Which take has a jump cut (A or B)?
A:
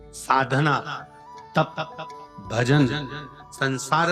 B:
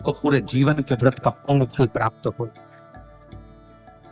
B